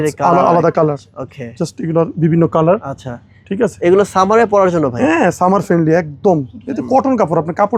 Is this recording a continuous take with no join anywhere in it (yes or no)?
yes